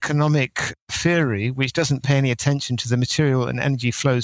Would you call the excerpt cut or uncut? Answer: uncut